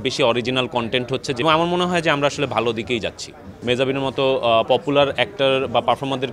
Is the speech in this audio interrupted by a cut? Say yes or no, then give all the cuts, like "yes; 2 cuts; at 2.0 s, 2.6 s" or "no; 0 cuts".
yes; 2 cuts; at 1.4 s, 3.5 s